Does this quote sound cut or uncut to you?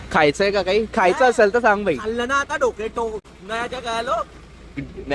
uncut